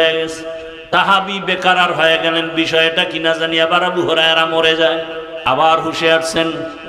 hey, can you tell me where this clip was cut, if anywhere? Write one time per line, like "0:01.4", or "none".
0:00.9
0:05.2

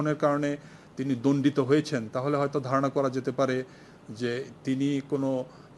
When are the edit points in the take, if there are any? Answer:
none

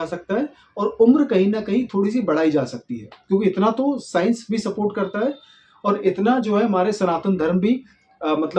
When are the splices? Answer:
none

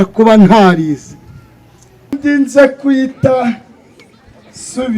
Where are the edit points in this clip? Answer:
0:02.2

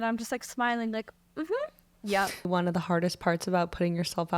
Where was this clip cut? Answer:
0:02.5

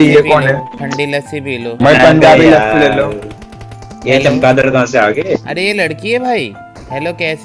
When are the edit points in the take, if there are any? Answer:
0:01.7

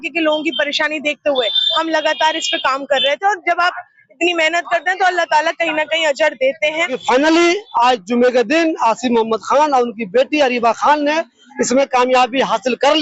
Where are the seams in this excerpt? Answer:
0:07.0

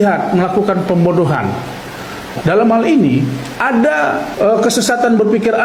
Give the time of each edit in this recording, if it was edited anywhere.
none

